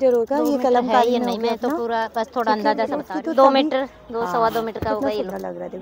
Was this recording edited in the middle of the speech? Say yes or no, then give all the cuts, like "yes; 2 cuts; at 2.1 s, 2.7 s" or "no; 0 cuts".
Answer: yes; 1 cut; at 3.1 s